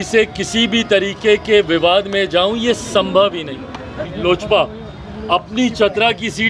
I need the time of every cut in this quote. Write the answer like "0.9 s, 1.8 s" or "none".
4.1 s